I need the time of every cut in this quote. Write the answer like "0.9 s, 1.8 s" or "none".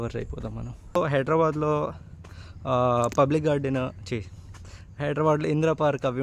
1.0 s

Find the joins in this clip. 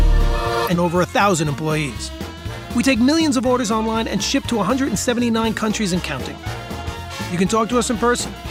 none

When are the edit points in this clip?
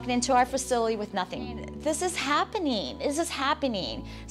1.5 s

